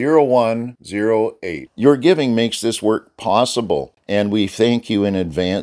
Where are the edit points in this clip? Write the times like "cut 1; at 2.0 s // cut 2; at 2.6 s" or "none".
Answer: cut 1; at 3.9 s